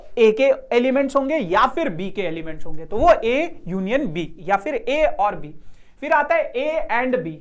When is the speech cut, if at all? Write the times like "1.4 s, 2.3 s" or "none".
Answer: none